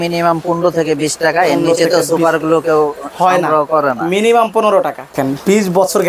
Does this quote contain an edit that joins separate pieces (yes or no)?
yes